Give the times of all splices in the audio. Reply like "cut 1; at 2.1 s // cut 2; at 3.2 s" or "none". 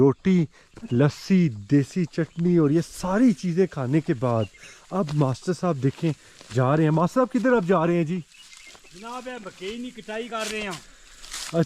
none